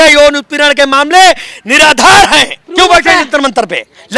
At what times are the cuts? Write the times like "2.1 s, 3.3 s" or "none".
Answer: 2.6 s